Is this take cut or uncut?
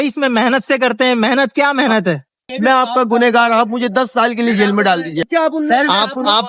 cut